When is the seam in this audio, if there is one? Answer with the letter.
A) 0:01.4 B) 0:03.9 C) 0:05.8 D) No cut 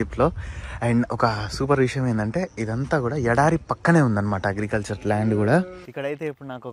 C